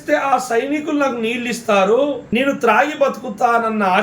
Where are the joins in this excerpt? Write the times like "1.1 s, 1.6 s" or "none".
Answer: 2.2 s